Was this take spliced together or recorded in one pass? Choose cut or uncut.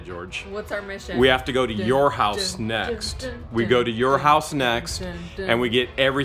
uncut